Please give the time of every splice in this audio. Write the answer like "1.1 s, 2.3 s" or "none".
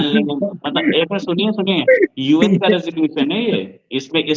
none